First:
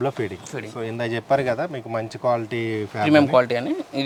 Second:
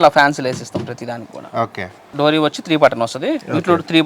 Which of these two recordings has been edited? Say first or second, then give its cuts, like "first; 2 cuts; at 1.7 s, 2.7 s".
second; 1 cut; at 2.1 s